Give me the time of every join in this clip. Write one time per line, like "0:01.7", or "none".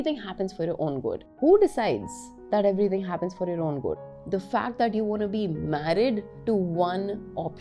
0:04.0

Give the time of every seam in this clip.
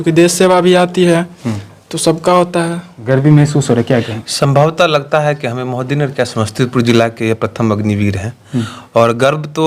0:02.9

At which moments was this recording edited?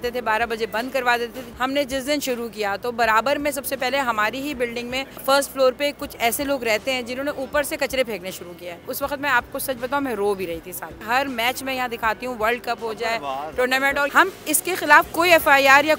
0:01.4
0:05.2
0:08.8
0:11.0
0:14.1

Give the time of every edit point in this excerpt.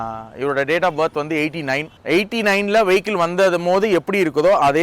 0:01.9

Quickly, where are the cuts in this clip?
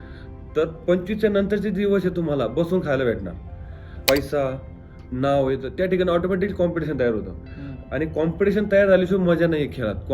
0:03.9

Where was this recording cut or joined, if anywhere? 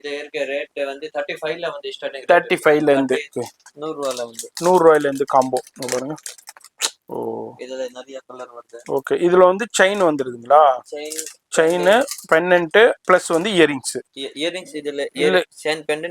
0:03.3

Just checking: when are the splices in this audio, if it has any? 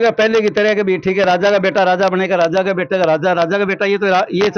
none

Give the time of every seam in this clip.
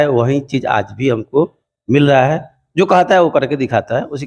none

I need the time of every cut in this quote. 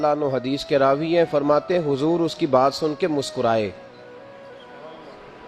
none

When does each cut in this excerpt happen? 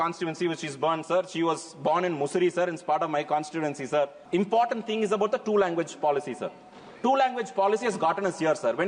0:04.2

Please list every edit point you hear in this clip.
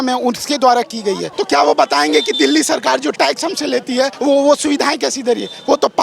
0:01.3
0:04.1

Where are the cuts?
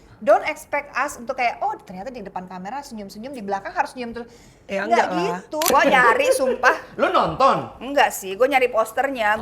0:05.7

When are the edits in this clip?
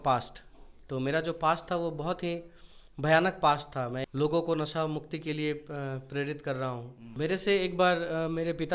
0:04.0
0:07.1

